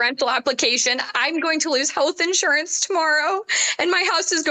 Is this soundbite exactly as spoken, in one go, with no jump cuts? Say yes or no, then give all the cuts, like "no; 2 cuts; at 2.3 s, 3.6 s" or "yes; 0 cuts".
yes; 0 cuts